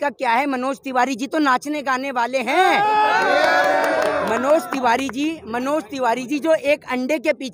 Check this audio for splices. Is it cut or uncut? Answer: uncut